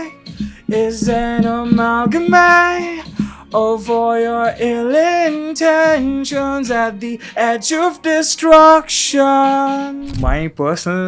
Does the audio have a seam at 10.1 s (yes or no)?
yes